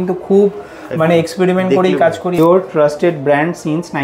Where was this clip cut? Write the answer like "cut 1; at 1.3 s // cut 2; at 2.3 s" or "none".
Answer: cut 1; at 2.4 s